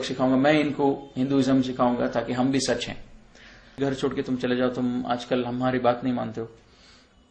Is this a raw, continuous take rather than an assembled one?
no; 1 cut; at 3.8 s

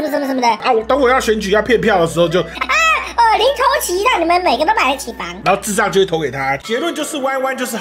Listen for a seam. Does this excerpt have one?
yes; 1 cut; at 6.6 s

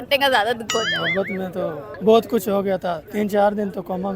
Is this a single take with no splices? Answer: no; 2 cuts; at 1.9 s, 3.0 s

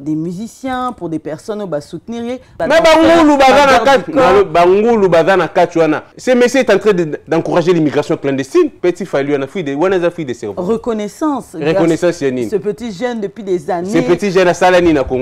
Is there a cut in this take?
yes; 3 cuts; at 2.6 s, 6.1 s, 8.7 s

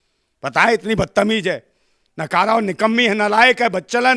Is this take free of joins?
yes; 0 cuts

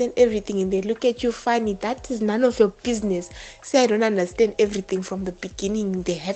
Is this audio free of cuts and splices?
yes; 0 cuts

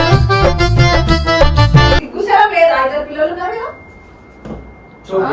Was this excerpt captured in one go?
no; 1 cut; at 2.1 s

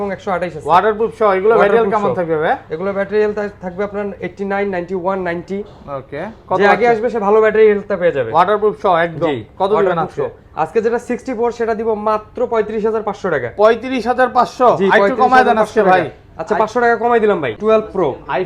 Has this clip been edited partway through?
yes; 1 cut; at 17.5 s

